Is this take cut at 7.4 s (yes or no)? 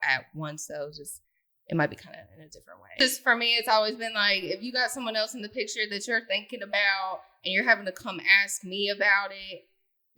no